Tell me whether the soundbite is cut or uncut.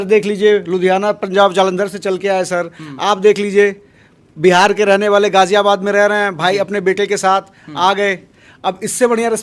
uncut